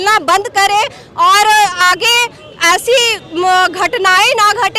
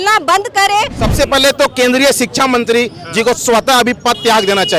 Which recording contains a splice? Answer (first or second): second